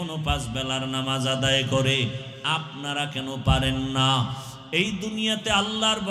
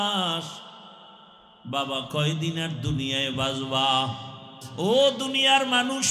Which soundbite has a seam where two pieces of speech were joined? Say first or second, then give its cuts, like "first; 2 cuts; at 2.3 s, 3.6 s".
second; 1 cut; at 4.6 s